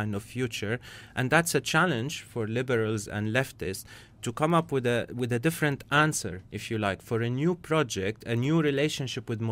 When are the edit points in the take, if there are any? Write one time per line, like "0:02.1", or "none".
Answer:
0:05.8